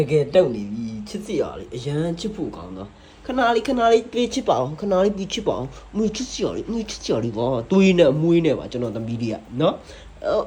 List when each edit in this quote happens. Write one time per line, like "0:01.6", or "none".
none